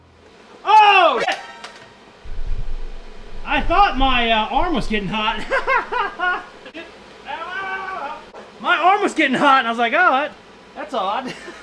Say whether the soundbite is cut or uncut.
cut